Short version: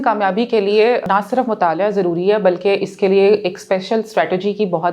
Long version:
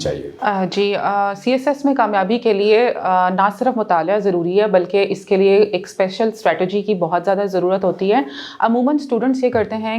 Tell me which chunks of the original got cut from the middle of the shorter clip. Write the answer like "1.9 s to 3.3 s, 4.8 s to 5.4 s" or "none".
3.0 s to 3.3 s